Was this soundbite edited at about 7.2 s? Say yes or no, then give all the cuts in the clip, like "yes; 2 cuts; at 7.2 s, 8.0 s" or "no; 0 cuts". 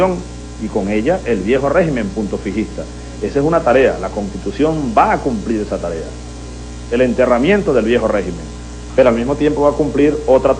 yes; 1 cut; at 7.2 s